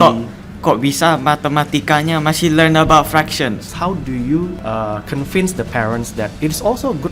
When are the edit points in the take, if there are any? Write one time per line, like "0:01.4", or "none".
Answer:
0:03.7
0:04.6
0:06.3

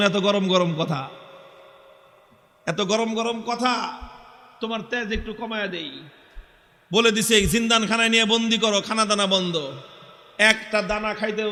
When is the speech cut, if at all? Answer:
none

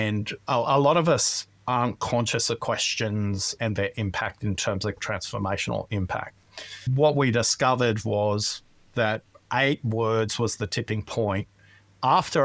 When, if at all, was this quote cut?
0:03.5
0:05.0
0:06.9

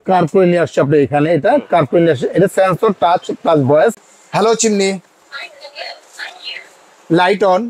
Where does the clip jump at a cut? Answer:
0:04.1

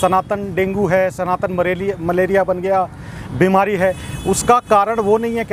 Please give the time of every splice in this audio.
none

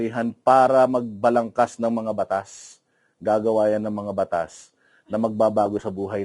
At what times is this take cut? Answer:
none

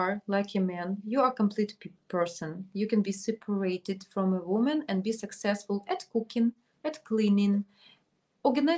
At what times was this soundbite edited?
none

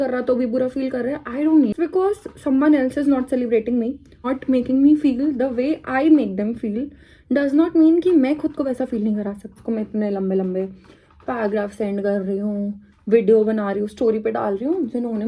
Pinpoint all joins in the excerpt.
0:01.7
0:04.3
0:09.6

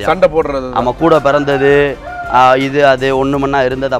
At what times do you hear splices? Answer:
none

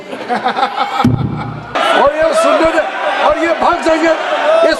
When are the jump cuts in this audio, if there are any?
0:01.7

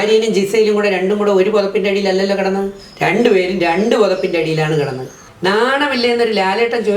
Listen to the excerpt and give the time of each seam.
0:05.1

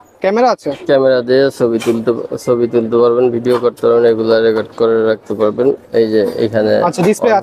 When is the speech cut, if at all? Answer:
0:05.8

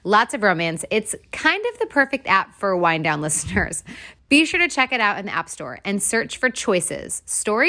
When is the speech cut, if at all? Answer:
none

